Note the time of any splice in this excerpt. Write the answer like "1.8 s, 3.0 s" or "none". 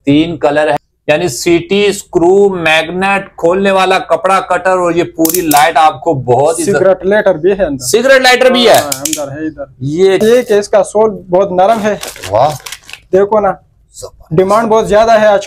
0.8 s, 10.2 s